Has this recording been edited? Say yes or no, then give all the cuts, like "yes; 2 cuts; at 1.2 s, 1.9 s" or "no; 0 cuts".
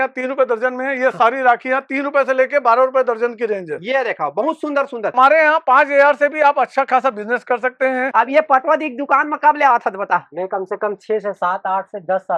yes; 2 cuts; at 5.1 s, 8.1 s